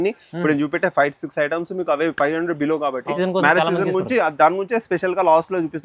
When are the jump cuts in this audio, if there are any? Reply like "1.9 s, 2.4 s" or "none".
3.1 s